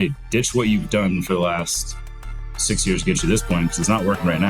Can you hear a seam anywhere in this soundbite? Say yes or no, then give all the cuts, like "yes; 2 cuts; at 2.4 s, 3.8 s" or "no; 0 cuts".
no; 0 cuts